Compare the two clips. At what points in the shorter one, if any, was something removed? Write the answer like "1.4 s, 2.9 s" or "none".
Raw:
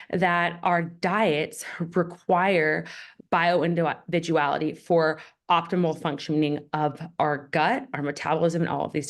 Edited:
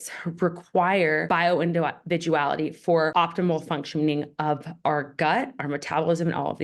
1.2 s, 3.1 s